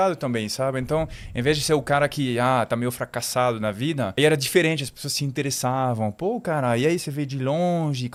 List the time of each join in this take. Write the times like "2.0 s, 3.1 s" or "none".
none